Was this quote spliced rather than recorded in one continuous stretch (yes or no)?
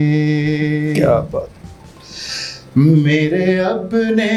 no